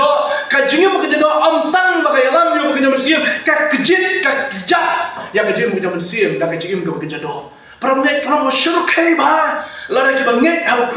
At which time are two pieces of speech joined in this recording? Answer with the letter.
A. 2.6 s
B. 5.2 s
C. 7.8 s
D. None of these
B